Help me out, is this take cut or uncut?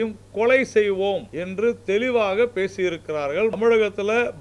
cut